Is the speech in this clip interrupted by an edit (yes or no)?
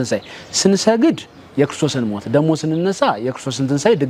no